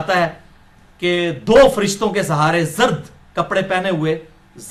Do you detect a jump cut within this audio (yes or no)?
no